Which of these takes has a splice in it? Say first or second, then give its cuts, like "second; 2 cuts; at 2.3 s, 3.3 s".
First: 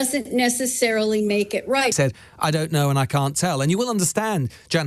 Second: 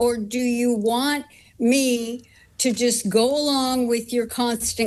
first; 1 cut; at 1.9 s